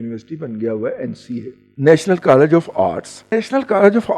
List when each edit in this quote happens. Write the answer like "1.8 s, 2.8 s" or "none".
1.6 s, 3.3 s